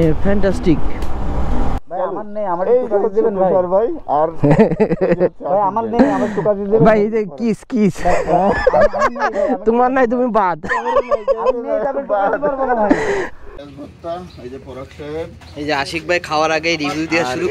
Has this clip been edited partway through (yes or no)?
yes